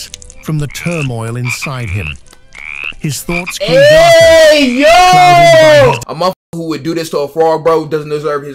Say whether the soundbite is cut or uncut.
cut